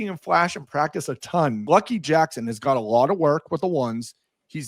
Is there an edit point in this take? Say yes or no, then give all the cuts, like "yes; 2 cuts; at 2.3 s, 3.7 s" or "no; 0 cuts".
yes; 1 cut; at 1.7 s